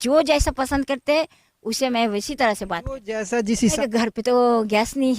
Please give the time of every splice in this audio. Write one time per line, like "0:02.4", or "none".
0:03.7